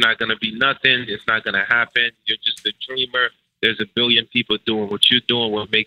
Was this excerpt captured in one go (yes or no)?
yes